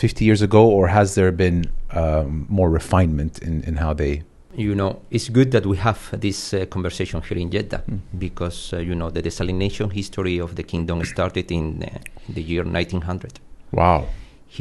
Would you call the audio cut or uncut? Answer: cut